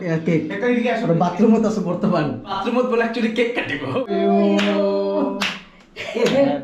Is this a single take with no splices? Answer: no; 2 cuts; at 2.6 s, 3.9 s

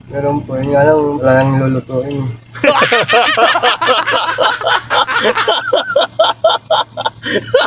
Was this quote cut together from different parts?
no; 0 cuts

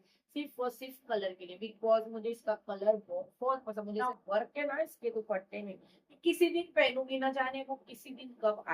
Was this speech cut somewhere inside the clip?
yes; 1 cut; at 4.0 s

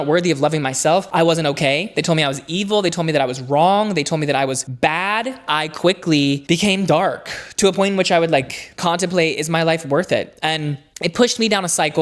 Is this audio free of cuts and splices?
no; 1 cut; at 5.4 s

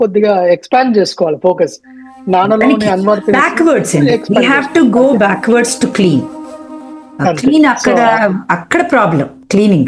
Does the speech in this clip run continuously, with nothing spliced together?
yes; 0 cuts

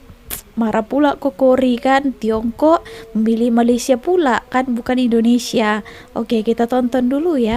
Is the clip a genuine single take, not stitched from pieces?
yes; 0 cuts

